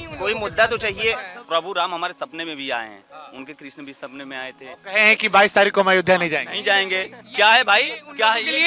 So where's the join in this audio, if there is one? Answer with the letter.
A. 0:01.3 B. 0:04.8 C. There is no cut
A